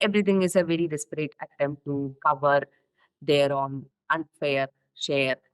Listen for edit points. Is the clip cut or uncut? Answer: cut